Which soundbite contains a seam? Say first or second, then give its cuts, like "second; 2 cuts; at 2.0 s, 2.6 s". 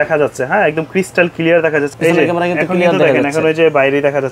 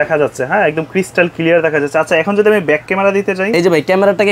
first; 1 cut; at 1.9 s